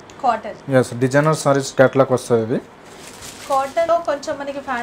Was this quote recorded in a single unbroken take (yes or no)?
no